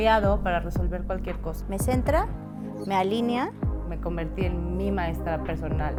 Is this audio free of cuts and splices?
yes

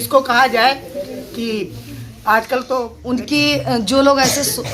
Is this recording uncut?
no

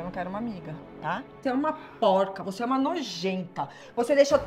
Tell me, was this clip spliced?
yes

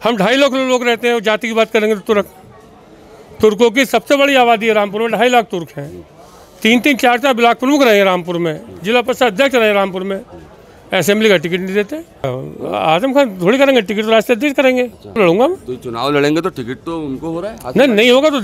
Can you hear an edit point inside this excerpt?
yes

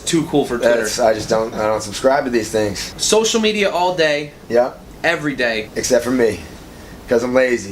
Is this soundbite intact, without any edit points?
no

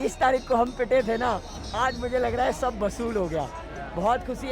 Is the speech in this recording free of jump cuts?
yes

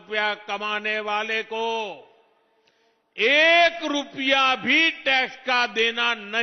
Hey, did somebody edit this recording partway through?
no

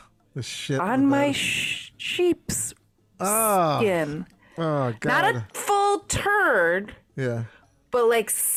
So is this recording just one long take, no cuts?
yes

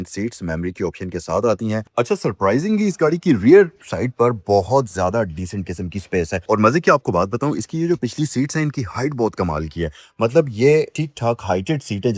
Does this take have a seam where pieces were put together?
yes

